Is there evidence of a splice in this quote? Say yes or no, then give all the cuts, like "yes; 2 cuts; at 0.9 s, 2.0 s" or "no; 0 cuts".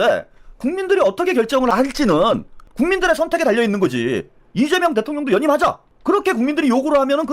yes; 2 cuts; at 1.7 s, 2.6 s